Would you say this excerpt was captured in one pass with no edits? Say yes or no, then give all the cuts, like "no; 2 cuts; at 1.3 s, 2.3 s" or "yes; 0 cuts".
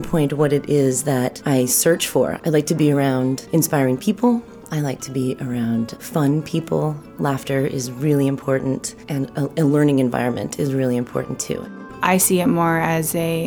no; 7 cuts; at 1.4 s, 2.3 s, 3.4 s, 6.0 s, 7.1 s, 9.0 s, 11.6 s